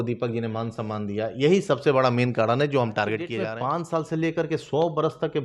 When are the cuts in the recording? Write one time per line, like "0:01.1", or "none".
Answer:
0:03.4